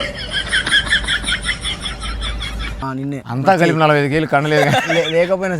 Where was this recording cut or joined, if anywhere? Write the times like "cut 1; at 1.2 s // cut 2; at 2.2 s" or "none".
cut 1; at 2.8 s